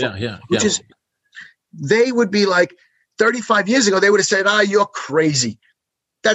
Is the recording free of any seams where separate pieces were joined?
yes; 0 cuts

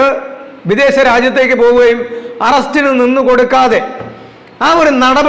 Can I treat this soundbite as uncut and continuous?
yes; 0 cuts

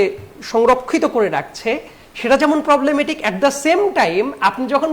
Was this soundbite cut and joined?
no; 0 cuts

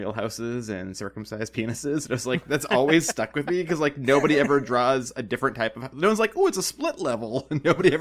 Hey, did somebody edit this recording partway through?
no; 0 cuts

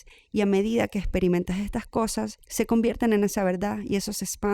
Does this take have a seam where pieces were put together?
yes; 1 cut; at 2.4 s

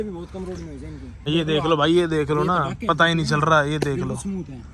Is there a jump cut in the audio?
yes; 1 cut; at 1.3 s

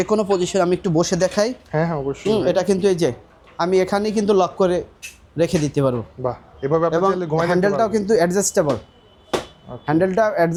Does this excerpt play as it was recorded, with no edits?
yes; 0 cuts

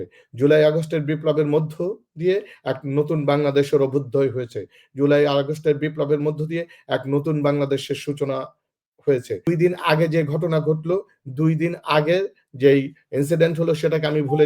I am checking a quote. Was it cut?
yes; 1 cut; at 9.5 s

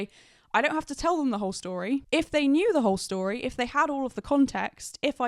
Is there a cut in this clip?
no; 0 cuts

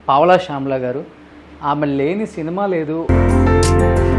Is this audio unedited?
no; 1 cut; at 3.0 s

